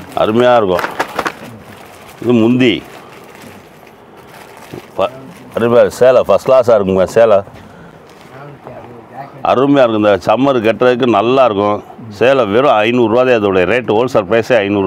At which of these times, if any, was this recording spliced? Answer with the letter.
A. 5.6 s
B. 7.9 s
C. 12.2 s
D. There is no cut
D